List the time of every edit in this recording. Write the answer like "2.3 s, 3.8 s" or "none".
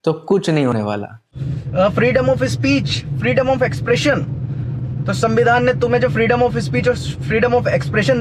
1.4 s